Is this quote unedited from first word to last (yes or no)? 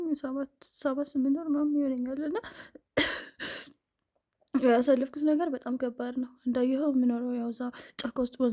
yes